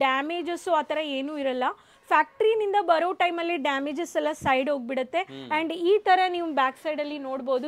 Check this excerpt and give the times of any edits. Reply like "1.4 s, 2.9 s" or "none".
none